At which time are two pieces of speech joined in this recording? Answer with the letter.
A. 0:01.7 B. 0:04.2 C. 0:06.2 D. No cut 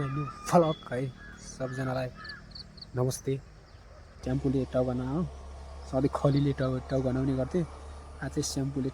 B